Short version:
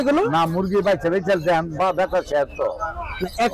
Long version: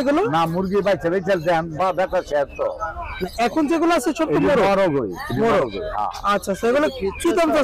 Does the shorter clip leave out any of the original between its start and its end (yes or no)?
no